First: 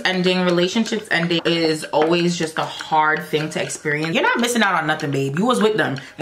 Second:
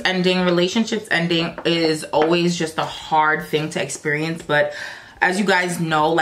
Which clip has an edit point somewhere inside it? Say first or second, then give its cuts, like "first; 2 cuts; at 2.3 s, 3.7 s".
first; 2 cuts; at 1.4 s, 4.1 s